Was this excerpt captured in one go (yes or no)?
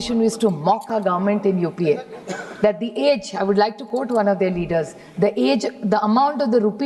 yes